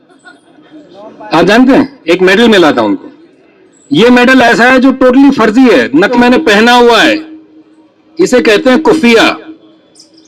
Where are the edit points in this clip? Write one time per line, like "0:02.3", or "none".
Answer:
0:06.1